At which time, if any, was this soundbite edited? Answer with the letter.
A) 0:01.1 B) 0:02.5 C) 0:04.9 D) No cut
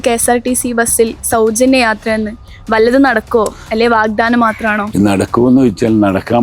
C